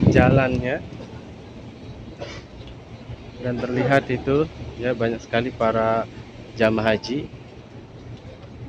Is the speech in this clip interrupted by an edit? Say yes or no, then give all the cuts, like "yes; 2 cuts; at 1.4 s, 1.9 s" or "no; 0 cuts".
no; 0 cuts